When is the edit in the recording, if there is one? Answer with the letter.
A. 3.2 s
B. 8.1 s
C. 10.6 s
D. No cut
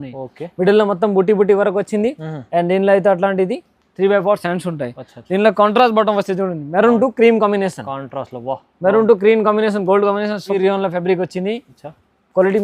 C